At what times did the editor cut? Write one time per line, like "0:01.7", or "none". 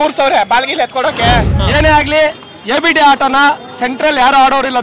0:01.5